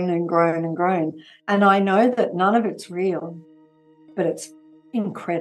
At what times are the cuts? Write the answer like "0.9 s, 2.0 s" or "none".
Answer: 4.1 s